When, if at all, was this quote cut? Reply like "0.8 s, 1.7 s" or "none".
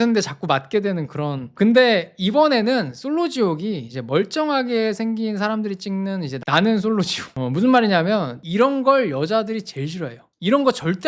7.2 s, 8.4 s